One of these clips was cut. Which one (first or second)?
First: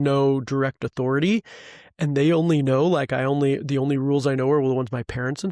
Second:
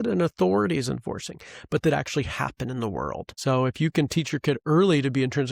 second